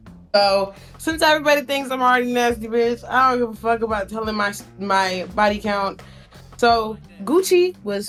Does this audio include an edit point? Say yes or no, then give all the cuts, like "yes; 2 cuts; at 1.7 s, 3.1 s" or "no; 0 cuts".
no; 0 cuts